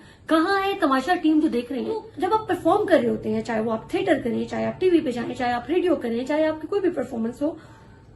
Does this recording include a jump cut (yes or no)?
yes